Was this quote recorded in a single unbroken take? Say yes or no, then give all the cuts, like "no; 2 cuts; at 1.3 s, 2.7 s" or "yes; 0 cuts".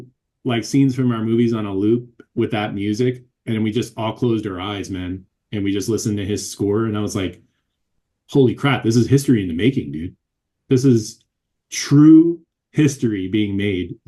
yes; 0 cuts